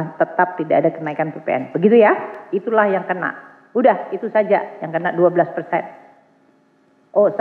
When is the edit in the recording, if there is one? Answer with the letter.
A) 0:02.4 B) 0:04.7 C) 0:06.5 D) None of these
A